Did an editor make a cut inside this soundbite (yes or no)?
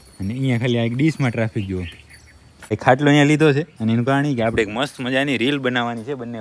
yes